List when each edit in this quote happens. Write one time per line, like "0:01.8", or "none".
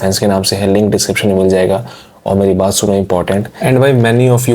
0:03.5